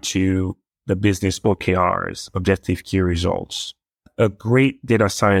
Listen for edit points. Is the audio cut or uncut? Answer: cut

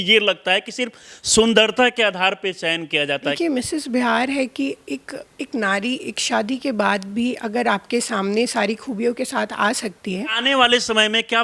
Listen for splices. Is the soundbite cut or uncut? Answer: cut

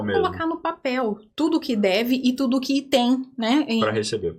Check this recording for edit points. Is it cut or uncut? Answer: uncut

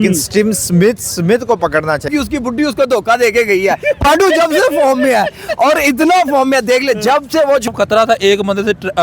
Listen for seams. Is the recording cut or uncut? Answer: cut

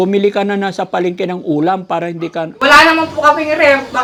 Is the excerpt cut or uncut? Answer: uncut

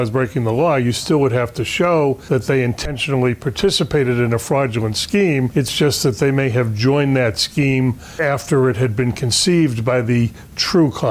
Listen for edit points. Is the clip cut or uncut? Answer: cut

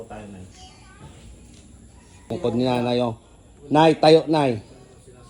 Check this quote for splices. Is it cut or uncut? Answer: cut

